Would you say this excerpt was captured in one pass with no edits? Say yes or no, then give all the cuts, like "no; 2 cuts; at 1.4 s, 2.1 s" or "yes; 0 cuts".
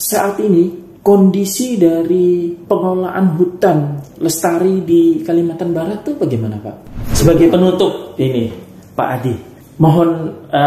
no; 3 cuts; at 2.6 s, 7.0 s, 9.6 s